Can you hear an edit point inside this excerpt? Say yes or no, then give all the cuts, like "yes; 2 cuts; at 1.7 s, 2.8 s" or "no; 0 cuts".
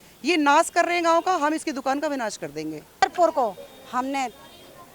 yes; 1 cut; at 3.0 s